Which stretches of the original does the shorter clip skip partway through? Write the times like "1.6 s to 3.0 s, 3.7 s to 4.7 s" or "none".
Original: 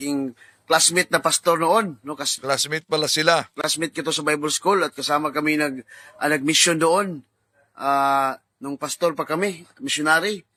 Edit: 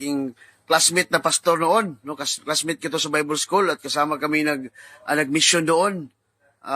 2.4 s to 3.5 s